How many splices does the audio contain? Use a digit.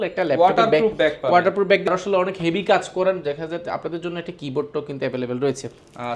1